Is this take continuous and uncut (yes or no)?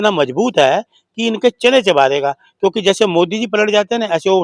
yes